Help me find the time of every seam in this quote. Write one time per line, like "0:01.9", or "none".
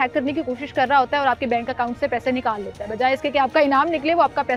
none